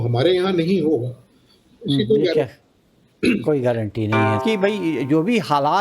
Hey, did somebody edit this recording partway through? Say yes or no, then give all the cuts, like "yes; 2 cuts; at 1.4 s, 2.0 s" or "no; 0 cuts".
yes; 1 cut; at 4.3 s